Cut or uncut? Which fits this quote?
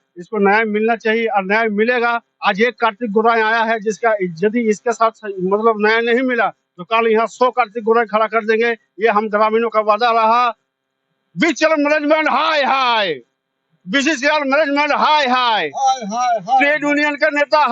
uncut